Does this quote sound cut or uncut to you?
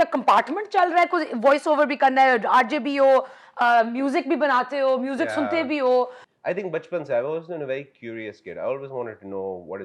cut